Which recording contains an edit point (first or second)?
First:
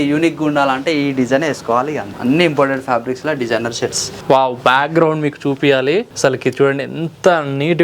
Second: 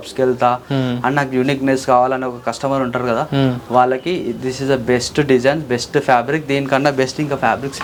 first